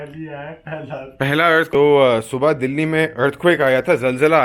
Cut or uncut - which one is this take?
cut